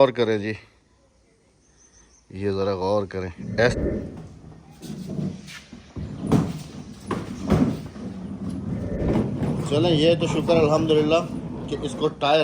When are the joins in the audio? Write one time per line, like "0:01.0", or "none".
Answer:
0:03.7
0:09.2